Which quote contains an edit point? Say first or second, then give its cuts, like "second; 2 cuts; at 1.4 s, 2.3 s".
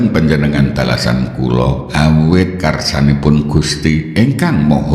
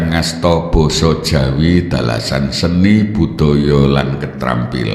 first; 1 cut; at 1.8 s